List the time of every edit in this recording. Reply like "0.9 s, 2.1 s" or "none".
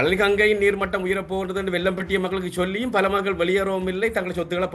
none